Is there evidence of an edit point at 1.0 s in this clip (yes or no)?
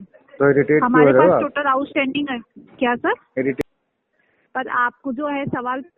no